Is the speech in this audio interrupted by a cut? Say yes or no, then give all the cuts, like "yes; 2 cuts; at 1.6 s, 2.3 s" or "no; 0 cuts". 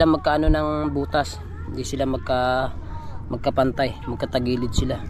no; 0 cuts